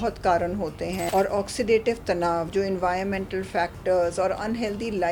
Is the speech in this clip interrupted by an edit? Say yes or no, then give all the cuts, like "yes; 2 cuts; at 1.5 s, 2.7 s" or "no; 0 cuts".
yes; 1 cut; at 1.1 s